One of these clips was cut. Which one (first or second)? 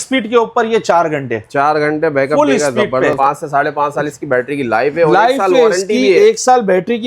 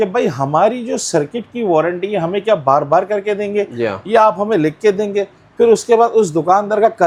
first